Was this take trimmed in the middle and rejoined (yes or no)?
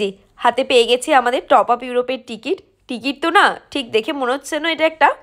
no